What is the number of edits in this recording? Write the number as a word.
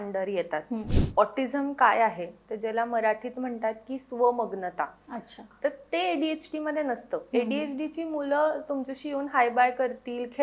two